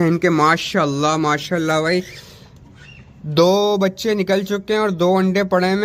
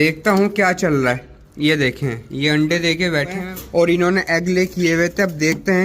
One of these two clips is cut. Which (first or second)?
second